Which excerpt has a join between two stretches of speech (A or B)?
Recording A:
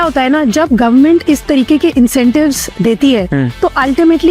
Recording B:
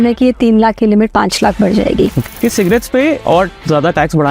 B